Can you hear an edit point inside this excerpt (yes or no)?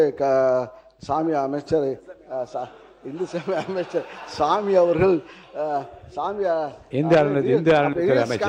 no